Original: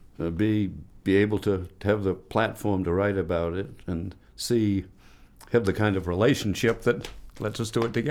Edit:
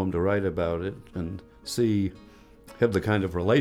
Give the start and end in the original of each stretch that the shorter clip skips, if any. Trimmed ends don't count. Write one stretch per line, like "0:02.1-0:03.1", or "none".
none